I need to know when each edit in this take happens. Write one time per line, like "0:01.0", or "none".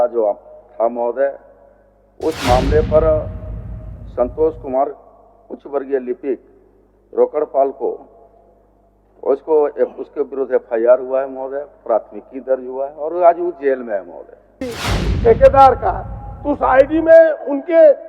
0:14.6